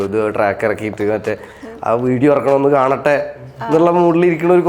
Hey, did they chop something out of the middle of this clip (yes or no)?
no